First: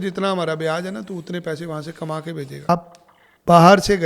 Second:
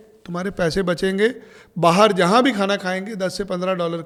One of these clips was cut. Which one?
first; 1 cut; at 2.7 s

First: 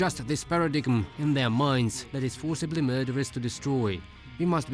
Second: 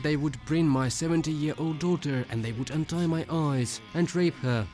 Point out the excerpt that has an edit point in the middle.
first; 2 cuts; at 1.1 s, 2.0 s

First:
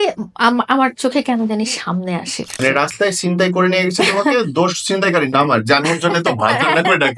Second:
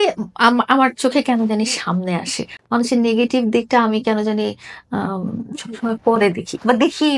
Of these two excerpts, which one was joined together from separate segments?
first; 1 cut; at 2.5 s

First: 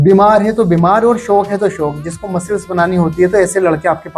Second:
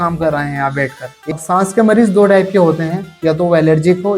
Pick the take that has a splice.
second; 1 cut; at 1.3 s

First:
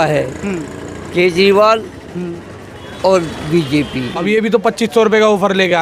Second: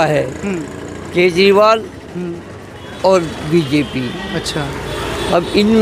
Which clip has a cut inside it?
first; 1 cut; at 4.2 s

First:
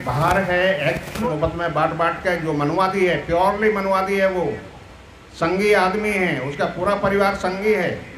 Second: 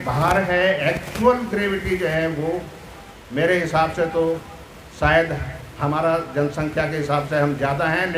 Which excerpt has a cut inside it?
first; 1 cut; at 1.2 s

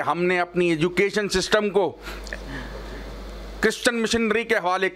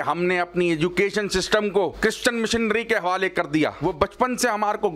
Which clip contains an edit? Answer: second; 2 cuts; at 2.0 s, 3.8 s

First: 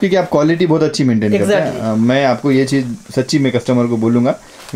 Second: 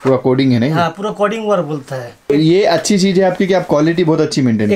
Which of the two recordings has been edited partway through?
second; 1 cut; at 2.3 s

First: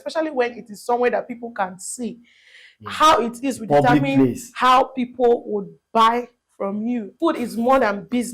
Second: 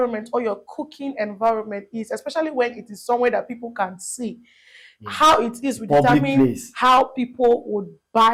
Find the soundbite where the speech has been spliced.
first; 1 cut; at 7.1 s

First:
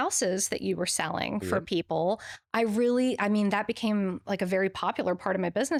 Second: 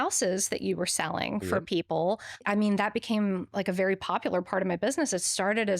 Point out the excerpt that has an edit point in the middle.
second; 1 cut; at 2.4 s

